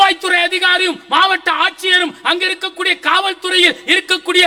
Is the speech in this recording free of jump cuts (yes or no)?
yes